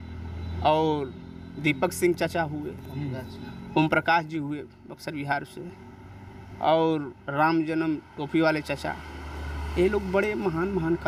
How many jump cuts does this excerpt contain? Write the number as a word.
zero